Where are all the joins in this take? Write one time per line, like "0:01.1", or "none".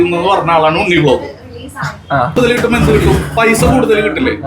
0:02.4